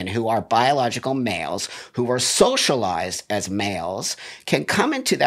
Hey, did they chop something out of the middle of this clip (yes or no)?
no